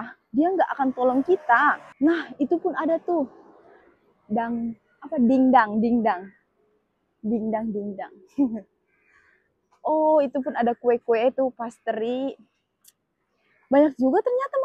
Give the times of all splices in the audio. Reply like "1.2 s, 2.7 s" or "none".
1.8 s